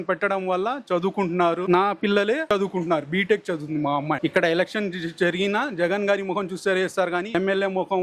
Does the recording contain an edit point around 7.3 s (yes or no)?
yes